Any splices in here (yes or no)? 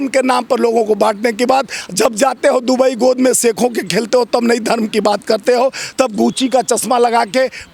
no